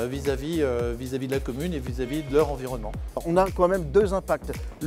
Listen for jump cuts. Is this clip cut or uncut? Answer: cut